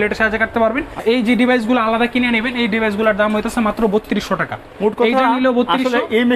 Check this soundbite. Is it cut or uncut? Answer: cut